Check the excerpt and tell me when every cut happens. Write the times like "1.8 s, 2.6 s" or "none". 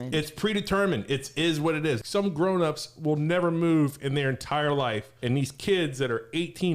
2.0 s, 5.1 s